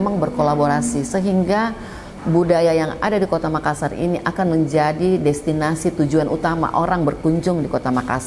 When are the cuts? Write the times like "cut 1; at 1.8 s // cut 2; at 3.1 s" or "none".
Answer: none